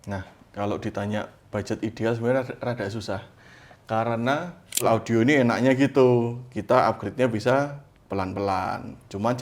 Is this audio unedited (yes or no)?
no